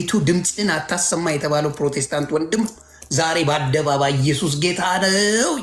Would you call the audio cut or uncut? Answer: uncut